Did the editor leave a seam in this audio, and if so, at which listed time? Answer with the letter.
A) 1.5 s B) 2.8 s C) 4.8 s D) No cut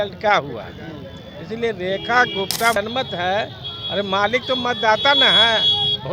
B